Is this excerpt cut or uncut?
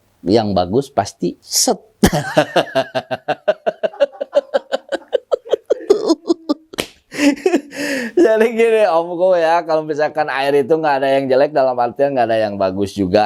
uncut